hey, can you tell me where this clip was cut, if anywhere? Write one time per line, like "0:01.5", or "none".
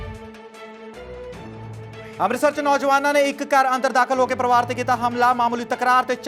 0:01.9